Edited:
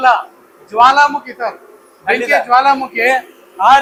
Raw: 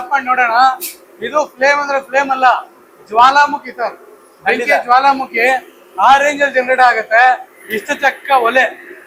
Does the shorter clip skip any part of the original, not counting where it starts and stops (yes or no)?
no